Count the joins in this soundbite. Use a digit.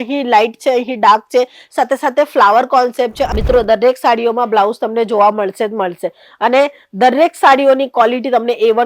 1